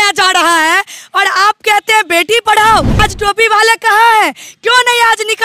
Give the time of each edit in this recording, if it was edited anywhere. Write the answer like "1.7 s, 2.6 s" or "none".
3.0 s